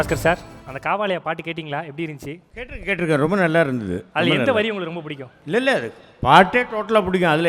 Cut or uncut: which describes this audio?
cut